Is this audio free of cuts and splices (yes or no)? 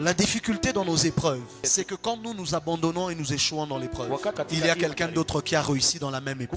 no